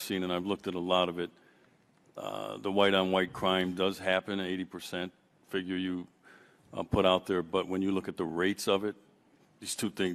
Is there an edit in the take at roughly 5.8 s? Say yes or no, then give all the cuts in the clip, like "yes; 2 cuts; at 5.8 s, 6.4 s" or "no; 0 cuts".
yes; 1 cut; at 5.8 s